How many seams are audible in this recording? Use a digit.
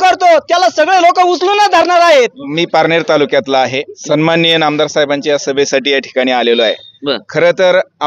2